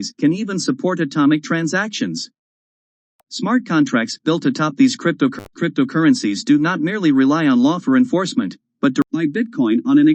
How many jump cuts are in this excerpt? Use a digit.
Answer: 1